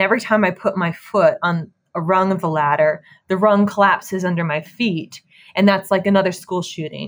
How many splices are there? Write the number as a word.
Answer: one